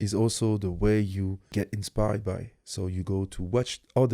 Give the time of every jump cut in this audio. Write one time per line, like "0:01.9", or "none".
0:01.5

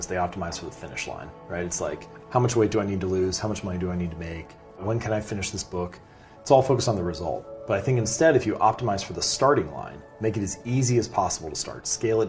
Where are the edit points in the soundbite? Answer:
0:04.8

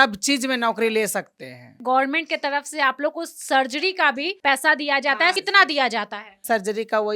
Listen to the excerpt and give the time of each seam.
0:01.7
0:04.3
0:05.4

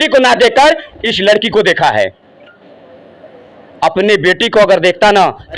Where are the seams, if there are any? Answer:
none

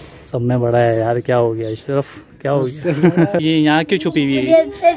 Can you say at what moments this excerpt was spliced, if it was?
0:03.4

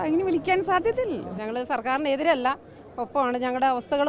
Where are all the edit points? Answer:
0:01.3

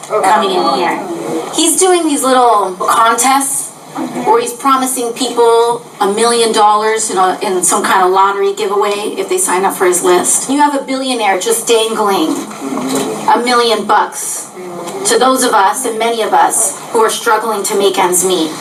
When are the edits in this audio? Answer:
none

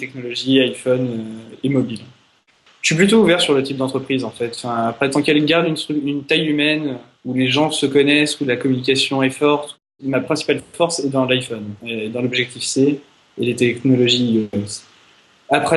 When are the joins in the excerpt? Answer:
0:09.8

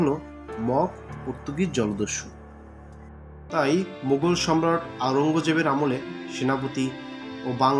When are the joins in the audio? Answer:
0:03.4

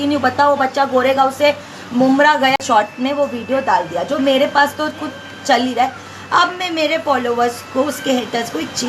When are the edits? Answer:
0:02.6

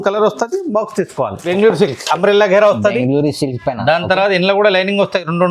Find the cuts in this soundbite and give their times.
0:01.4

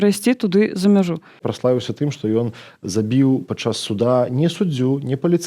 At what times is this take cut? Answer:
0:01.4

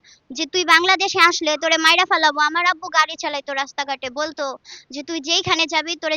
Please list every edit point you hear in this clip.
none

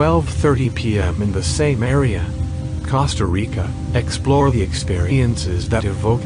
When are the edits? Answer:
0:03.0

